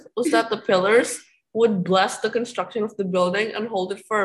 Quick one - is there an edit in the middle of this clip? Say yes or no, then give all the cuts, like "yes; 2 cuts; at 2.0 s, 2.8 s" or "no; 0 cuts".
no; 0 cuts